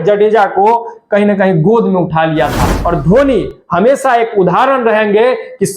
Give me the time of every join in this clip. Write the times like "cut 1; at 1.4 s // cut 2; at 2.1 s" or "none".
cut 1; at 2.7 s